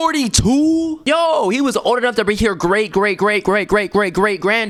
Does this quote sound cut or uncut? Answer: uncut